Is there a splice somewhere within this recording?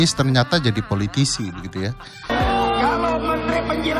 yes; 1 cut; at 2.3 s

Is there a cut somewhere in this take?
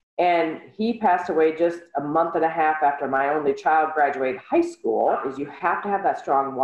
yes; 1 cut; at 5.3 s

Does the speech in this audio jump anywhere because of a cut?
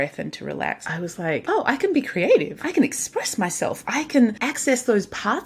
yes; 3 cuts; at 1.1 s, 2.6 s, 4.5 s

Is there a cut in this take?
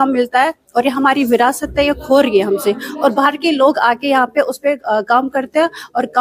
no; 0 cuts

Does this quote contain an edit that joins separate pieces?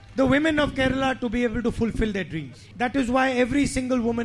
yes; 1 cut; at 2.6 s

